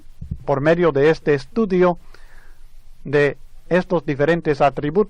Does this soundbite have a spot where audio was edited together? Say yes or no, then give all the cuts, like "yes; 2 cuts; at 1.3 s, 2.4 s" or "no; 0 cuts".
no; 0 cuts